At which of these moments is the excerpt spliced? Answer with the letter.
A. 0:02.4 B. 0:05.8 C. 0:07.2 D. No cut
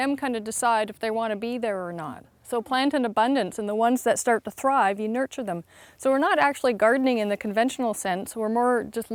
D